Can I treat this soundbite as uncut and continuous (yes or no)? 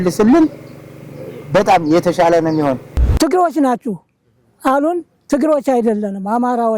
no